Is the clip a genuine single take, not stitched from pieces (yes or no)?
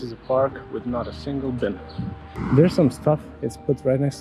no